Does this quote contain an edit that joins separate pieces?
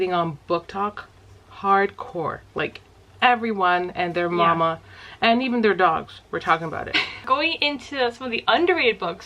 yes; 1 cut; at 7.2 s

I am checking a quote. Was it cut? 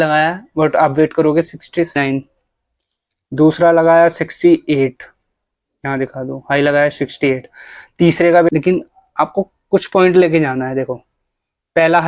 yes; 2 cuts; at 2.0 s, 8.5 s

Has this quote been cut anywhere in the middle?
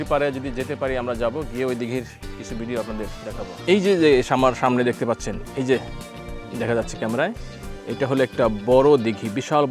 yes; 1 cut; at 3.6 s

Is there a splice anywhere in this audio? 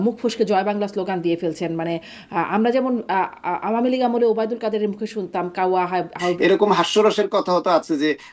yes; 1 cut; at 6.4 s

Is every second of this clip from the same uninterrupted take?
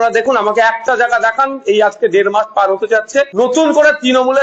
no; 1 cut; at 3.3 s

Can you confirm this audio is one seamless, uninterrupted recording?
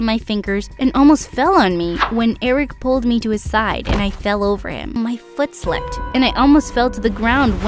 no; 1 cut; at 5.0 s

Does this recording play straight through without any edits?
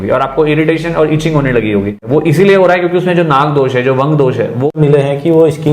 no; 2 cuts; at 2.0 s, 4.7 s

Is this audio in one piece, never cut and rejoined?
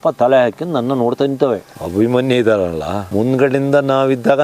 no; 2 cuts; at 1.7 s, 3.0 s

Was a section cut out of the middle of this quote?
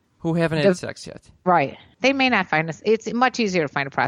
yes; 1 cut; at 1.8 s

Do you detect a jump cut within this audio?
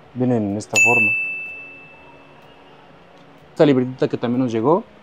yes; 1 cut; at 3.5 s

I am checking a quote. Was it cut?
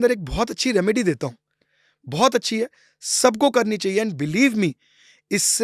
no; 0 cuts

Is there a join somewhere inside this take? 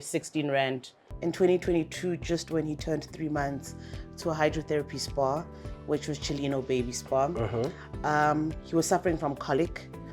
yes; 1 cut; at 1.0 s

